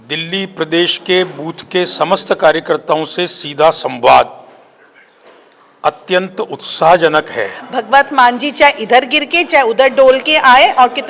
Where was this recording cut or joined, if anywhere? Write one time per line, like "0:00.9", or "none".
0:07.6